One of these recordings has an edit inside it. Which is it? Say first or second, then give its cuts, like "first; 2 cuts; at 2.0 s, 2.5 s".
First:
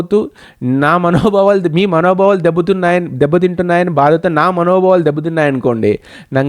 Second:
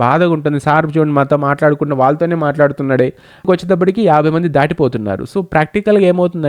second; 1 cut; at 3.5 s